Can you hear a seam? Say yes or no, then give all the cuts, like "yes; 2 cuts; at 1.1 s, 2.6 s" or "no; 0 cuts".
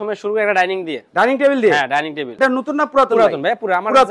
yes; 1 cut; at 2.2 s